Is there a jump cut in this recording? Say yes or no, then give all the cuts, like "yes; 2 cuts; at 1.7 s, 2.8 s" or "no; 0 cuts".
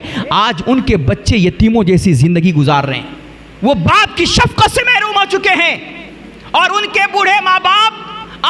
no; 0 cuts